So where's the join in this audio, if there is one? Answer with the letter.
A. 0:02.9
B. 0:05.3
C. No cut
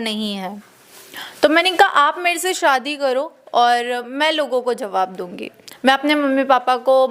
C